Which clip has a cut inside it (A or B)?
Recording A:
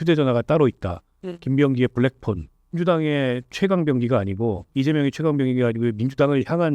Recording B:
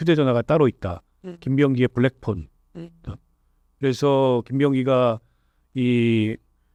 A